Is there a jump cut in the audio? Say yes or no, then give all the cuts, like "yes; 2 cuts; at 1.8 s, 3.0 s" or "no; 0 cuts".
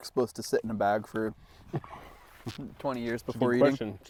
no; 0 cuts